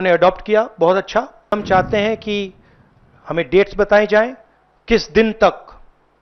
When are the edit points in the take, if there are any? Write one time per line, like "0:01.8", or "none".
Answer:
0:01.5